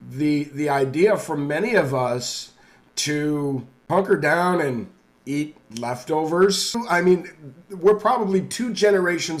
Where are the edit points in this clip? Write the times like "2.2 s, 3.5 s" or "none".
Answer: 3.7 s, 6.8 s